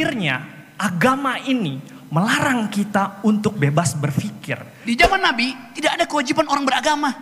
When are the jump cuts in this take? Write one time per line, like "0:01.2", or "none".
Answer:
0:04.7